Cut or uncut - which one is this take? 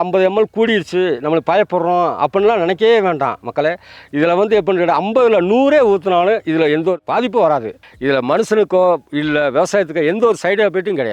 cut